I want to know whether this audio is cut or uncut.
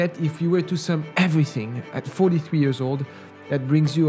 uncut